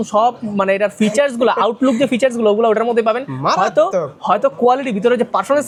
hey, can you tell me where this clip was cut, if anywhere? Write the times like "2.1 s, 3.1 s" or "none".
none